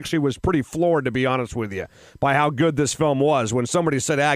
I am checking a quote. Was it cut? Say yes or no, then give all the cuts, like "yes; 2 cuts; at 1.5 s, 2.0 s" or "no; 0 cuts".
no; 0 cuts